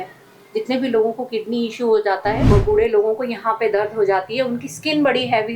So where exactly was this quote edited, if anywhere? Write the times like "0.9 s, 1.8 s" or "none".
2.4 s